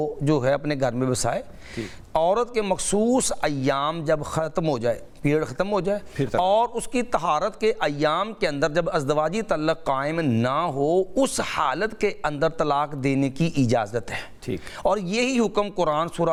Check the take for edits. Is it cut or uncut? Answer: uncut